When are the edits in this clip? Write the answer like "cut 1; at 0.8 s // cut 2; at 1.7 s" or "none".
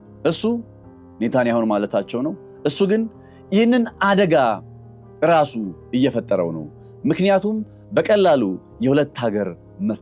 none